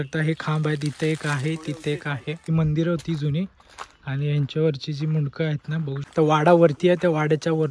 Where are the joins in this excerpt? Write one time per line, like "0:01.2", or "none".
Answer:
0:02.5
0:06.1